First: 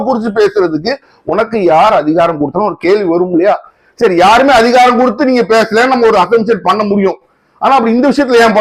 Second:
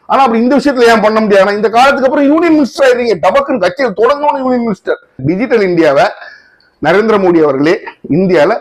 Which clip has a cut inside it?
second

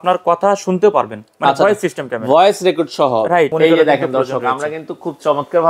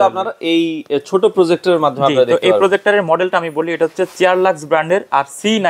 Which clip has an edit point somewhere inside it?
first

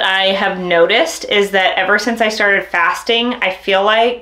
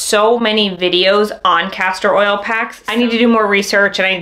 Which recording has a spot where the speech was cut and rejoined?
second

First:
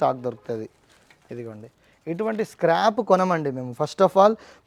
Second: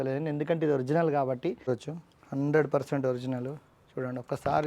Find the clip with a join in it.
second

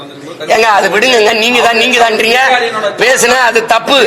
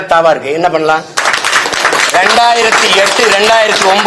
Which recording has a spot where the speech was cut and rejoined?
second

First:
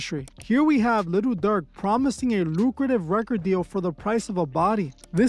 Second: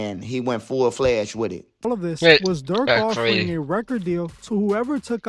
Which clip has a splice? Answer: second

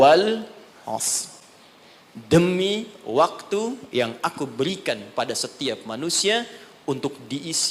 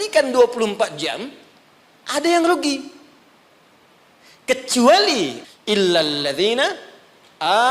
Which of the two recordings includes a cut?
second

